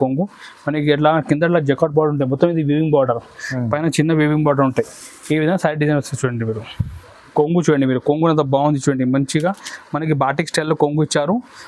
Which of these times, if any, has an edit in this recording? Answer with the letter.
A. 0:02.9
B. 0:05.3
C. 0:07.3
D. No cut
C